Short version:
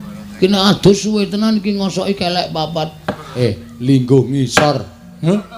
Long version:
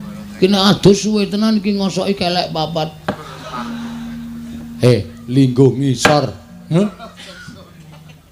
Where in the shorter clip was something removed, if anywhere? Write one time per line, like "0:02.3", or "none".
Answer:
0:03.4